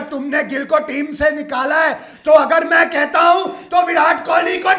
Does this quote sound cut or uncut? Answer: uncut